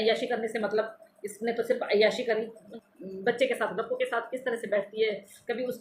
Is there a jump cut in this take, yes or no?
yes